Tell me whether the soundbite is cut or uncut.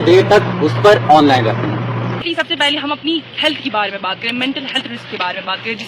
cut